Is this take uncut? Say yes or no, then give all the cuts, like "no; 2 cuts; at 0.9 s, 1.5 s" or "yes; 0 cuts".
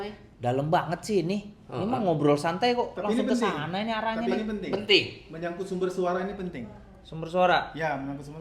yes; 0 cuts